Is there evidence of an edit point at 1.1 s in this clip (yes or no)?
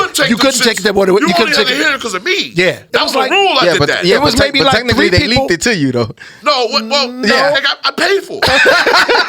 no